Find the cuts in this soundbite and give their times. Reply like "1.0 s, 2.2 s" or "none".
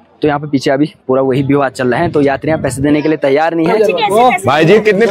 3.7 s